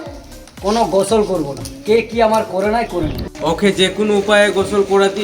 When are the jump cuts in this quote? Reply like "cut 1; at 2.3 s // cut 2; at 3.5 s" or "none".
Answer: cut 1; at 3.2 s

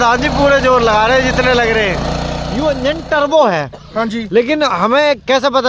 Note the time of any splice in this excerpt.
cut 1; at 2.3 s

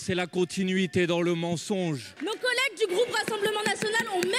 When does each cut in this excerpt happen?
cut 1; at 2.1 s

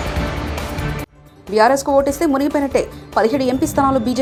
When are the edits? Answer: none

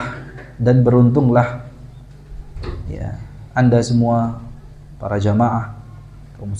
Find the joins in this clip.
none

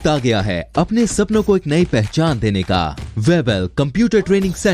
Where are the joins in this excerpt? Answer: cut 1; at 3.0 s

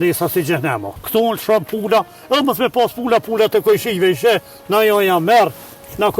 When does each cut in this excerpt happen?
cut 1; at 0.9 s

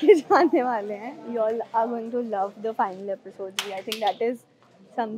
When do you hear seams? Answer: none

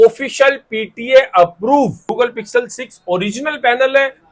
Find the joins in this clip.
cut 1; at 2.1 s

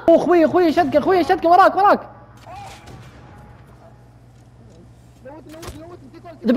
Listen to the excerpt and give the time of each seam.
none

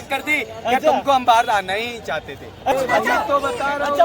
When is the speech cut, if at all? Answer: cut 1; at 2.7 s

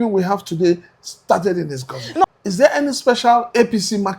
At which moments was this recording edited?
cut 1; at 2.2 s

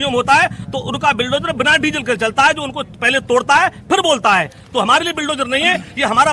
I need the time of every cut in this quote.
none

